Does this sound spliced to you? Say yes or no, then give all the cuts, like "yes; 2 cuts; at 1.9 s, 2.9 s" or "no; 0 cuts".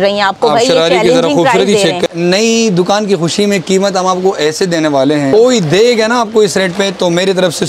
yes; 2 cuts; at 2.0 s, 5.3 s